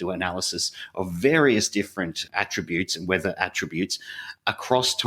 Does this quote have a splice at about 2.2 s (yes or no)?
no